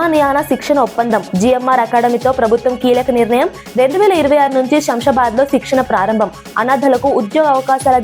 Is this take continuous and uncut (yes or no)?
yes